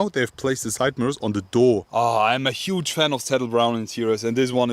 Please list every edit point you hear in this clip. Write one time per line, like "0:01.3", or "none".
0:01.9